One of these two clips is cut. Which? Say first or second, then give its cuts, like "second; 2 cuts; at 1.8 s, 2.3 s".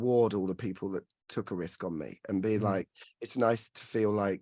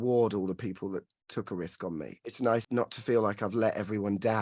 second; 1 cut; at 2.3 s